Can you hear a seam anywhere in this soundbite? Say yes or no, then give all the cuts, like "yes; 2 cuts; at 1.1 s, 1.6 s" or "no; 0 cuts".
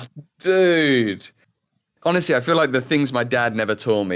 no; 0 cuts